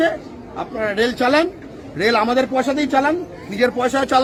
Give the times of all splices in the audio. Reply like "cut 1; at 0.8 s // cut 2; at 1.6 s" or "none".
none